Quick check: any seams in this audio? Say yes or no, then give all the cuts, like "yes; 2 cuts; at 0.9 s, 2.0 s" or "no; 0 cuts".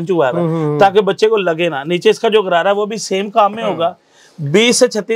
no; 0 cuts